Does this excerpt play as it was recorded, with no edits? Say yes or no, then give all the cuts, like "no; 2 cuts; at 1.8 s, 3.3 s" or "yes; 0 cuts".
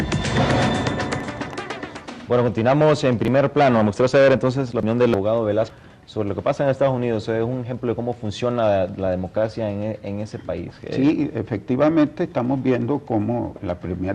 yes; 0 cuts